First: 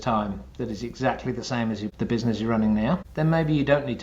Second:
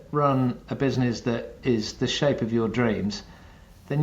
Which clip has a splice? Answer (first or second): first